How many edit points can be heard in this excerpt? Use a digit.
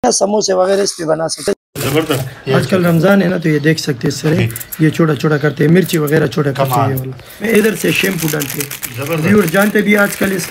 2